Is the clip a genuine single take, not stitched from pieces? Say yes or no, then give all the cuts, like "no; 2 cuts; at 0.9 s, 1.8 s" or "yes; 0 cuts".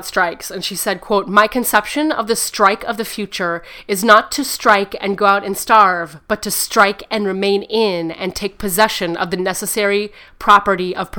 yes; 0 cuts